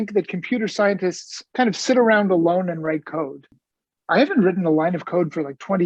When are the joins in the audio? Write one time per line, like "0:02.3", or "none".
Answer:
none